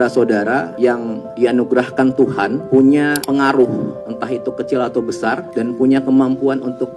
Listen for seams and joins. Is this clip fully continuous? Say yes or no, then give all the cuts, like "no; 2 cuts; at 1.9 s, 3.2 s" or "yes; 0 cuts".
no; 5 cuts; at 0.9 s, 2.6 s, 3.2 s, 4.1 s, 5.5 s